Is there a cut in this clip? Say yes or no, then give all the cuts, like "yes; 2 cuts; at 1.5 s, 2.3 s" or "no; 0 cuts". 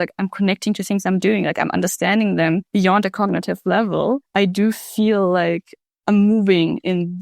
yes; 2 cuts; at 2.6 s, 4.2 s